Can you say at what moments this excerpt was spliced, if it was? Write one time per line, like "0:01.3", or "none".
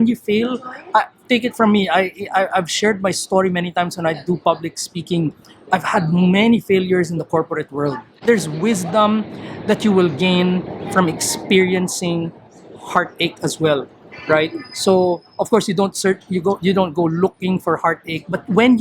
0:08.1